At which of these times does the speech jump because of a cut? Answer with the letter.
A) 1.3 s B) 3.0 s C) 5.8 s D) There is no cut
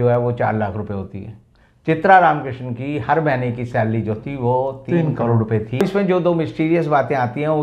C